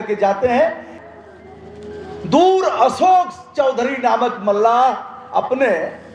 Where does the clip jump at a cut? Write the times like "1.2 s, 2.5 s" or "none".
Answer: 1.0 s